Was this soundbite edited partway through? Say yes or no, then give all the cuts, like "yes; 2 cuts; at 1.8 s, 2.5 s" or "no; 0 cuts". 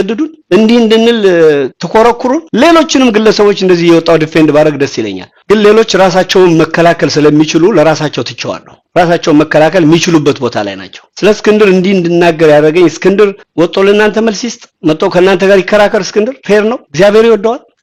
no; 0 cuts